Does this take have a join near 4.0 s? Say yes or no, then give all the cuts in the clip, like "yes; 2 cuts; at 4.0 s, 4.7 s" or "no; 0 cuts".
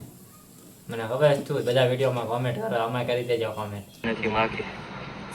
yes; 1 cut; at 4.0 s